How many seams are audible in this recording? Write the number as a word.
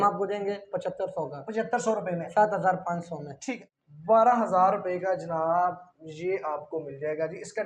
one